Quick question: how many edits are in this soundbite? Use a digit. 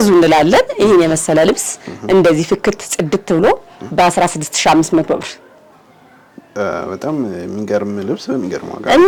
0